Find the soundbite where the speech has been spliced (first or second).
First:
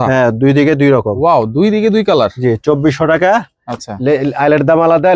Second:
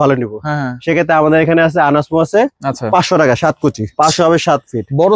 second